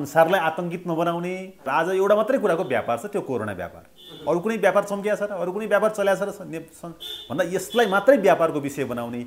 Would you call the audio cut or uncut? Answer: cut